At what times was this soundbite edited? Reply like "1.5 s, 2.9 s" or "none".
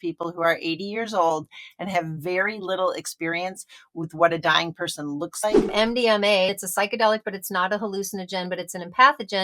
5.7 s, 6.5 s